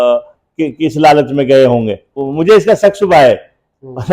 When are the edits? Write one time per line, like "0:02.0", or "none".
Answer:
0:02.2